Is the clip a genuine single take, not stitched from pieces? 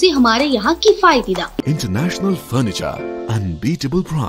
no; 1 cut; at 1.6 s

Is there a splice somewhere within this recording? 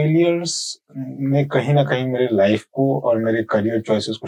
no; 0 cuts

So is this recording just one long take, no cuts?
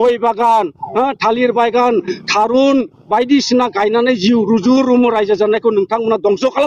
yes; 0 cuts

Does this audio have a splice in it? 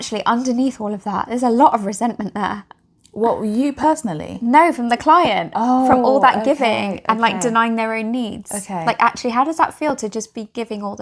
no; 0 cuts

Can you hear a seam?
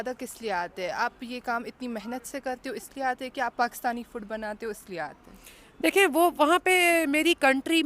no; 0 cuts

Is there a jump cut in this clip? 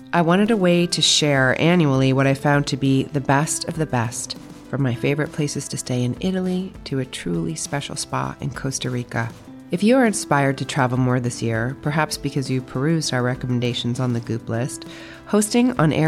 no; 0 cuts

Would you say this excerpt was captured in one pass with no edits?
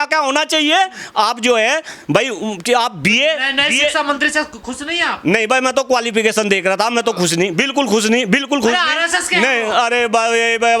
yes; 0 cuts

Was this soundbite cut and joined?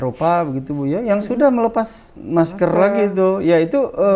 yes; 1 cut; at 2.1 s

